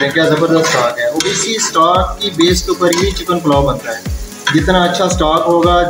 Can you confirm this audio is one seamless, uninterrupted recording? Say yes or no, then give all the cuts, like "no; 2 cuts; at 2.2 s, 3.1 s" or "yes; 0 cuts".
yes; 0 cuts